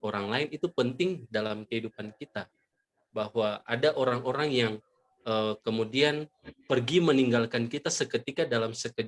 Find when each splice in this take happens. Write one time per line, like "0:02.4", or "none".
none